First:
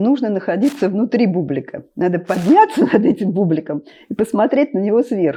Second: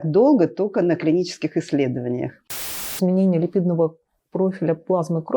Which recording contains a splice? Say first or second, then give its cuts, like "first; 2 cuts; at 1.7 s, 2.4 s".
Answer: second; 1 cut; at 2.9 s